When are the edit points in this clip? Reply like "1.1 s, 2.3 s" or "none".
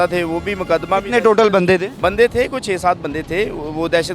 1.9 s